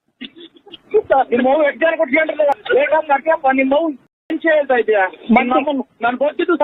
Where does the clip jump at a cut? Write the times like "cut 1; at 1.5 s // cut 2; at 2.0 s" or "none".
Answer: cut 1; at 2.6 s